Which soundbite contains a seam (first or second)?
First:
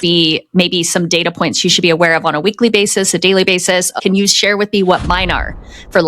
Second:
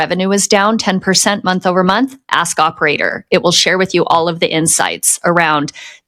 first